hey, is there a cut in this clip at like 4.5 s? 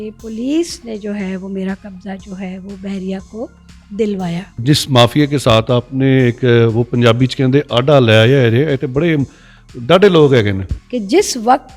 yes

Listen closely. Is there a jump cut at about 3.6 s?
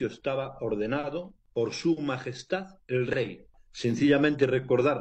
yes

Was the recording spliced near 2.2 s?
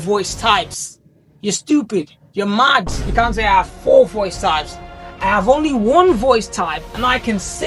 no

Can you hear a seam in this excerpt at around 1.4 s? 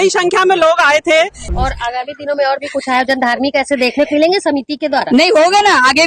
yes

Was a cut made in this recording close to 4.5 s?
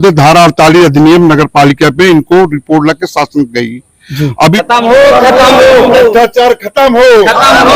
yes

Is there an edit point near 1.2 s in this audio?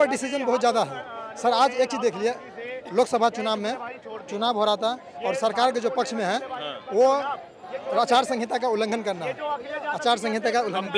no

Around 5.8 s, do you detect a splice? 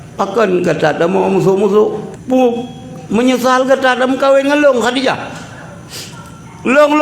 no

